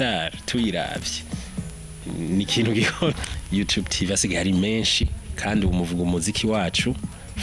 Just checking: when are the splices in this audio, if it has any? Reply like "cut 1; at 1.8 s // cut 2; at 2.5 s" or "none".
cut 1; at 3.2 s